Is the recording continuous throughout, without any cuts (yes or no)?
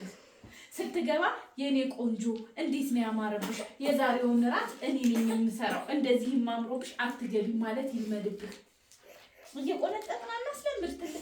yes